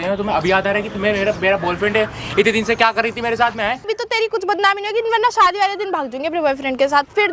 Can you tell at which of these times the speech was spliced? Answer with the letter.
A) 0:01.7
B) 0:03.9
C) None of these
B